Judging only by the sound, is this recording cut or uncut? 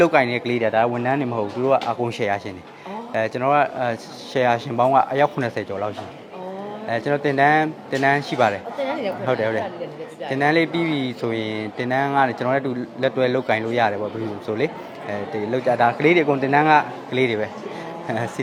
uncut